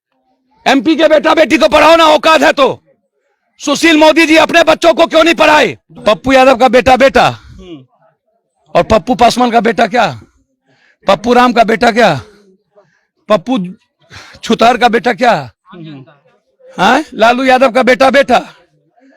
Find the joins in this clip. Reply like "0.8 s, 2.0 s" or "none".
5.9 s